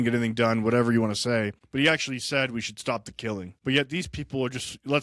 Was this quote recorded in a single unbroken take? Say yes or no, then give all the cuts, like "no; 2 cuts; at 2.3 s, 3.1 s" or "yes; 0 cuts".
no; 2 cuts; at 1.6 s, 3.5 s